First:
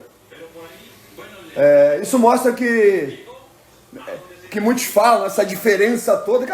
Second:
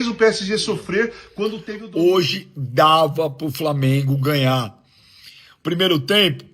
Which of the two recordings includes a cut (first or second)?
second